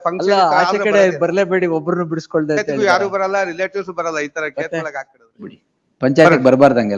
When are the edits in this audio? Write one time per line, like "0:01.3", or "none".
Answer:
0:05.6